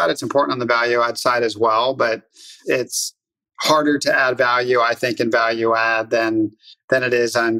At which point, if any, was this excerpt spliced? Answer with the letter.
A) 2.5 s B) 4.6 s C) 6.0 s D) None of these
A